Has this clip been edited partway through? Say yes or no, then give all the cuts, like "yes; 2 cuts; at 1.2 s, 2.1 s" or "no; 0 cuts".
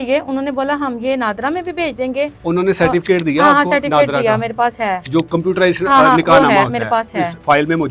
no; 0 cuts